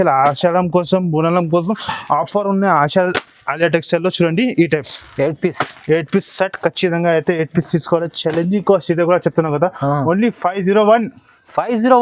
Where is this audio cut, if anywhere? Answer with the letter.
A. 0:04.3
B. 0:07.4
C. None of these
C